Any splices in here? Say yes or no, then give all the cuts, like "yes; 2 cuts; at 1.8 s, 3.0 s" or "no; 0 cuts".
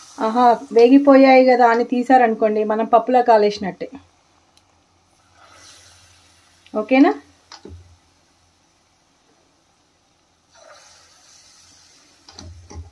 no; 0 cuts